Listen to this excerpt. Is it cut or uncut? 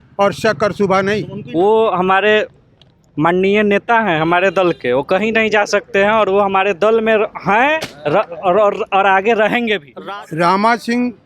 cut